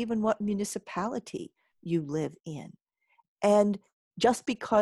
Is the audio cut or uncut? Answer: uncut